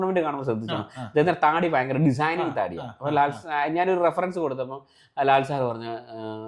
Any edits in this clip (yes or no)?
no